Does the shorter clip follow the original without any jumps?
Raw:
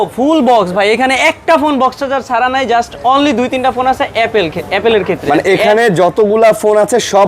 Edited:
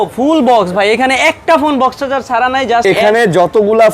no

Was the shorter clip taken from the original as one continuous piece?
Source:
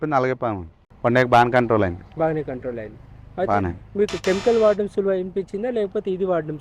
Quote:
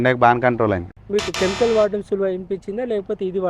no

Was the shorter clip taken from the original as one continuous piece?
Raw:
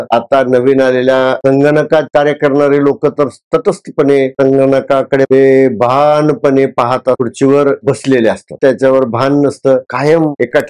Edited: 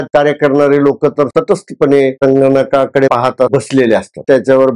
no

